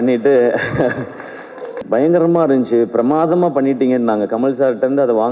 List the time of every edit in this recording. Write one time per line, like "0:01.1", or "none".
0:01.8